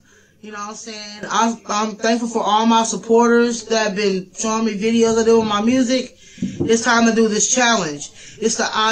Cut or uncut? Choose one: uncut